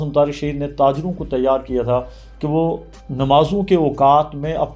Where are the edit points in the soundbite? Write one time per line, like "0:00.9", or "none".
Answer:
none